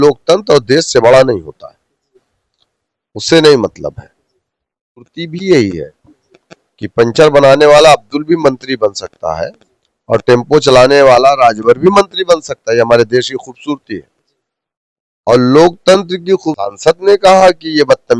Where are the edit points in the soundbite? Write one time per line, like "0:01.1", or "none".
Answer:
0:05.2
0:16.7